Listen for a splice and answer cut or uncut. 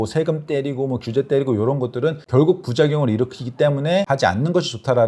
cut